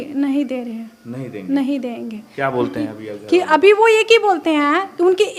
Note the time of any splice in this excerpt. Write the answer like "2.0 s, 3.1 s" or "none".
none